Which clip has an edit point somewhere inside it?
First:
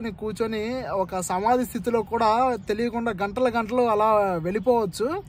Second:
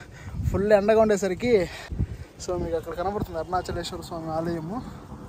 second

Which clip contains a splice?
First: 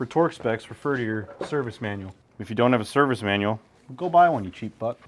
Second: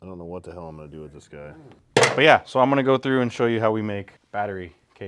second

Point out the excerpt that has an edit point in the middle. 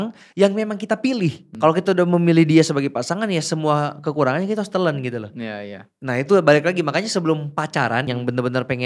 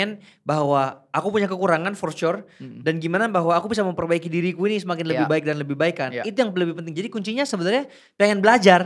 first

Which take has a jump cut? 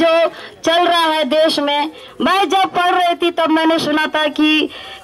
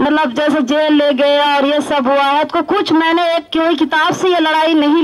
second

